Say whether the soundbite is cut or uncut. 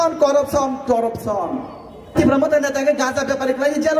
cut